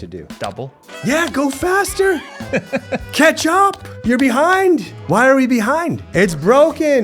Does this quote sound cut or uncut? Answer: cut